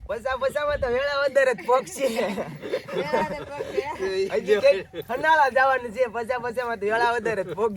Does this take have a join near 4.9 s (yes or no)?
no